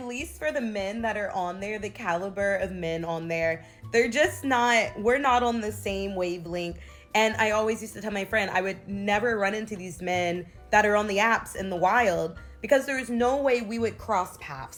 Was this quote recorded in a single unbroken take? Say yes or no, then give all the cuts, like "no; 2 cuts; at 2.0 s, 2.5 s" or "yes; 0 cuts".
yes; 0 cuts